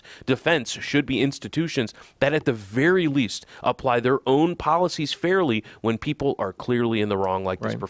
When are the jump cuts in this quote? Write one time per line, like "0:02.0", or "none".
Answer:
none

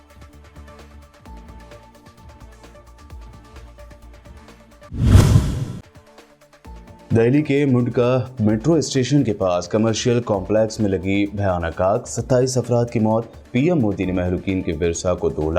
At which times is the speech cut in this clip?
0:01.5

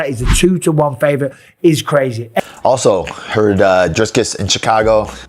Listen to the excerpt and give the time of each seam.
0:02.5

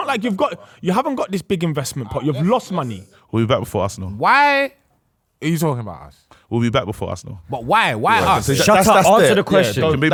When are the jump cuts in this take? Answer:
none

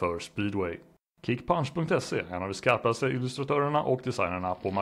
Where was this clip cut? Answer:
0:01.1

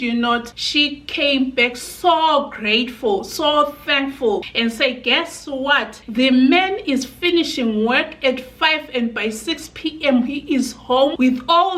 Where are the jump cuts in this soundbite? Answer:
0:04.5

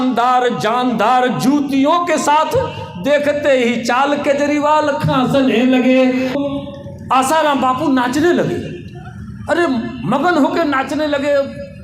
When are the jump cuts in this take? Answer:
0:06.3

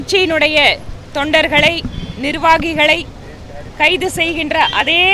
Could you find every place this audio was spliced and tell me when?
none

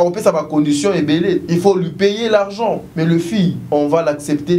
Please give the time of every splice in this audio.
0:01.4
0:02.9
0:03.6

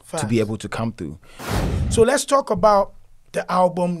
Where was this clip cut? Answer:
0:01.5

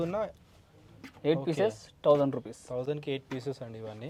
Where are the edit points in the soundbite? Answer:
none

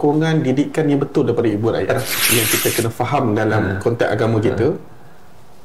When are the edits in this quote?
0:01.9

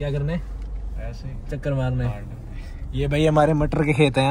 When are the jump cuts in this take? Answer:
none

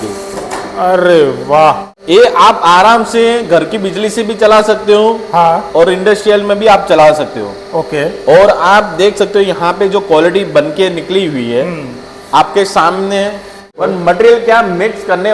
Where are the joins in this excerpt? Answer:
0:01.9
0:13.8

